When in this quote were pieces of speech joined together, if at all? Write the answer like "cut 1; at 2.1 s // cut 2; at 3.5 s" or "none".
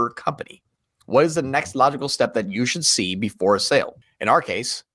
cut 1; at 4.0 s